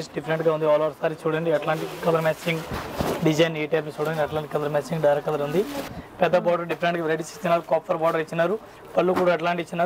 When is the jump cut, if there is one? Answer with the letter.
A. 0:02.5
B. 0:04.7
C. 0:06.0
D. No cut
C